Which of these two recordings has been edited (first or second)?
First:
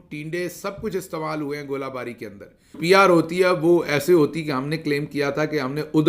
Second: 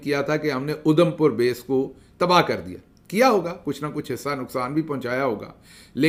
first